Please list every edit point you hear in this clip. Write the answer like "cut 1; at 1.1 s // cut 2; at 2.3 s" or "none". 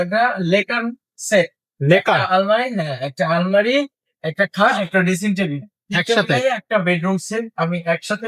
none